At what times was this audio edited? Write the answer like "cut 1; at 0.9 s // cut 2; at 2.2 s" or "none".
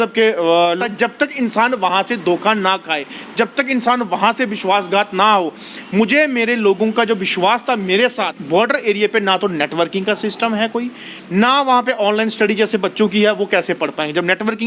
cut 1; at 0.8 s // cut 2; at 8.4 s